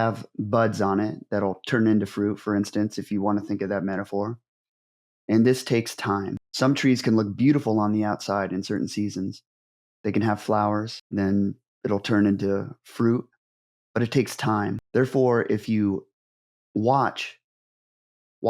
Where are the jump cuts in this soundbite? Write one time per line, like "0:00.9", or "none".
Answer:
0:06.4
0:11.0
0:14.8